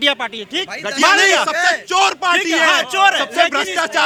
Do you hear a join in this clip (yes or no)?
no